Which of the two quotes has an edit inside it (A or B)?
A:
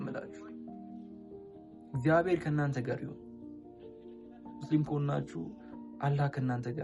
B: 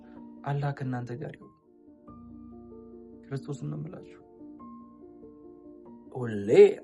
B